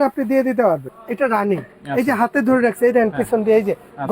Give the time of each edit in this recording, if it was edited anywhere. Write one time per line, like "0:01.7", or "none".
0:00.9